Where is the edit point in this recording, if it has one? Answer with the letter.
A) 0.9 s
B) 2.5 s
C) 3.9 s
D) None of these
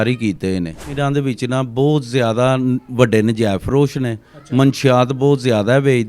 A